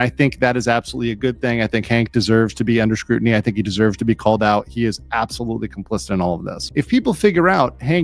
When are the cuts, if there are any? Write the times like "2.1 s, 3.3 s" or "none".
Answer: 6.6 s